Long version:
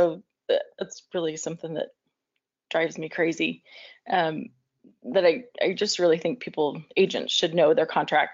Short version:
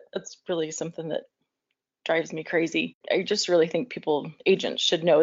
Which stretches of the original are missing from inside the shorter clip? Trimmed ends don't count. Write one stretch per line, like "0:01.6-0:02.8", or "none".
0:03.6-0:05.5

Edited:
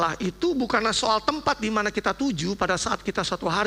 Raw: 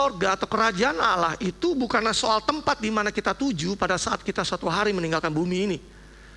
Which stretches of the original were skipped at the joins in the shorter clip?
none

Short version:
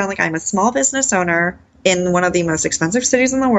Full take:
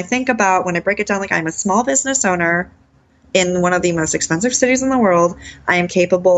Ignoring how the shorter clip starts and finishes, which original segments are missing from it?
0:02.8-0:03.1

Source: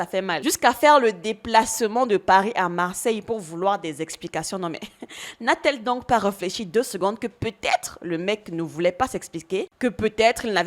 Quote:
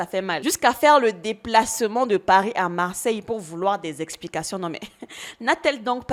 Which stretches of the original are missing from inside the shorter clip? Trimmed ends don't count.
none

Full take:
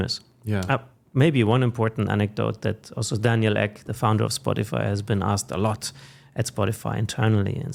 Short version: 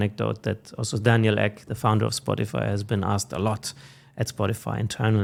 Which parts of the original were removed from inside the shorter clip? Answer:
none

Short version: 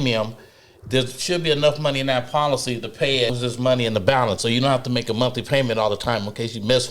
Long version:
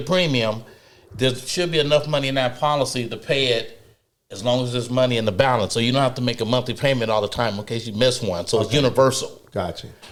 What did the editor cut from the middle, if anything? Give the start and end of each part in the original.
0:03.6-0:04.7

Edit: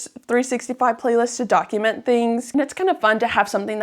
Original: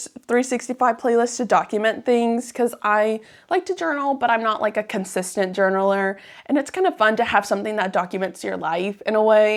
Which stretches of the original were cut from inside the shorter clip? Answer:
0:02.4-0:06.4

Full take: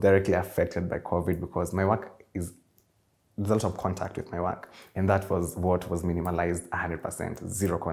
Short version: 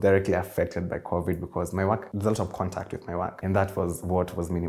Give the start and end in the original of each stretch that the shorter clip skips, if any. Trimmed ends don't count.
0:02.1-0:03.3
0:04.6-0:04.9

